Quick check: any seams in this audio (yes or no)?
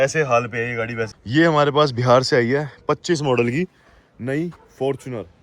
yes